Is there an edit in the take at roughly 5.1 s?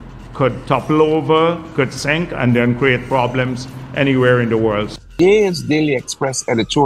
yes; 1 cut; at 5.1 s

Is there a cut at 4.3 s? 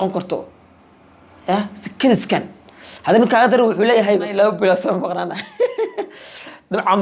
yes; 1 cut; at 4.3 s

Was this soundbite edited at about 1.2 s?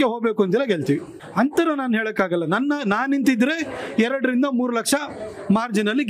no; 0 cuts

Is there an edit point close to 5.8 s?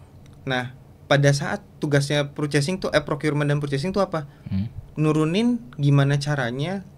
no; 0 cuts

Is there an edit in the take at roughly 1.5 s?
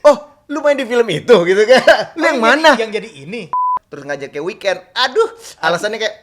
no; 1 cut; at 3.7 s

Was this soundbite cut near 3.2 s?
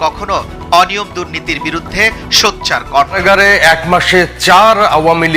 yes; 1 cut; at 3.2 s

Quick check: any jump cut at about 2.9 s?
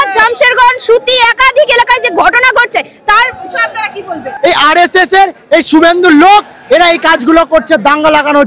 no; 1 cut; at 4.3 s

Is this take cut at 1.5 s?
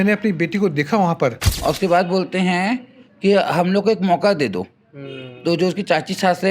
yes; 1 cut; at 1.5 s

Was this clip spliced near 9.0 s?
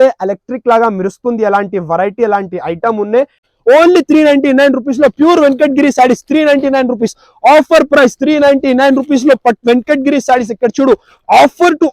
no; 1 cut; at 3.4 s

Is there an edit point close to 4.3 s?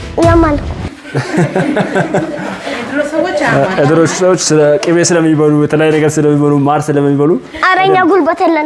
no; 0 cuts

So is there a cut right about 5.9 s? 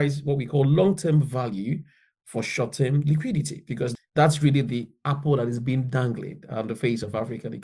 no; 1 cut; at 3.9 s

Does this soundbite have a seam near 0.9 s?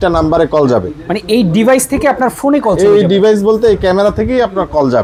no; 0 cuts

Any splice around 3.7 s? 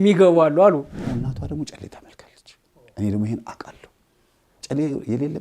no; 1 cut; at 1.0 s

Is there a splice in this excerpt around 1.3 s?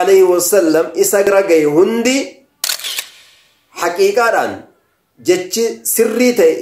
yes; 1 cut; at 1.3 s

